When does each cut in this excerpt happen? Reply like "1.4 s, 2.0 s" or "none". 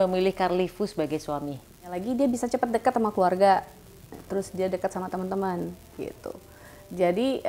1.9 s